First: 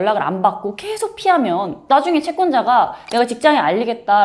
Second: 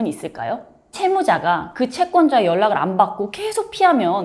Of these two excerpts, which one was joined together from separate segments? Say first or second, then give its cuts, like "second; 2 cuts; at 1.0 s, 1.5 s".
second; 1 cut; at 1.0 s